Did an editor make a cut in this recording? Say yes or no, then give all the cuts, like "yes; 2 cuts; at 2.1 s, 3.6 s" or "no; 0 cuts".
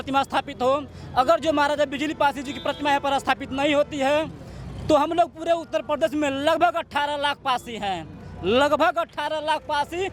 no; 0 cuts